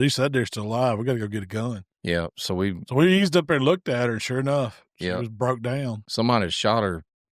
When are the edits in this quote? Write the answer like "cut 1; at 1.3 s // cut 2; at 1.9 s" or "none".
cut 1; at 6.0 s